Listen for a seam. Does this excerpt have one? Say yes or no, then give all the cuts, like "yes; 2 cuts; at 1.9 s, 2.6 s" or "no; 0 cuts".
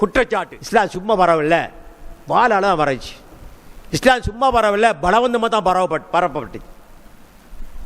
yes; 1 cut; at 1.0 s